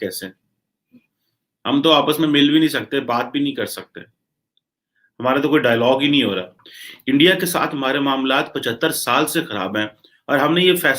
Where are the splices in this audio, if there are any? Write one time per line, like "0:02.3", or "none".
0:06.9

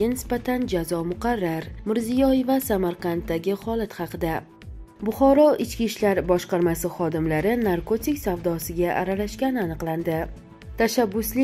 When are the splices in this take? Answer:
0:04.5
0:10.4

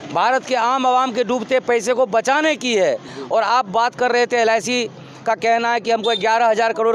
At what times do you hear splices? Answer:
none

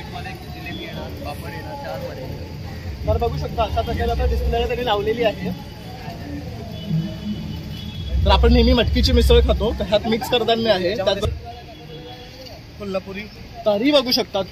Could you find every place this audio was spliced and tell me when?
0:11.2

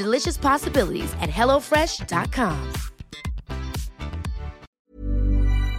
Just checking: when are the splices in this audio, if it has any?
0:04.7

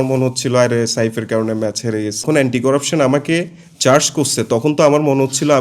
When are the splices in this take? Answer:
0:02.6

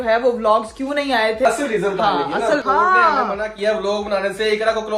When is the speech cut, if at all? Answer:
0:01.4
0:02.6

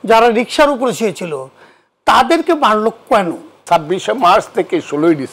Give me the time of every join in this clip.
0:03.6

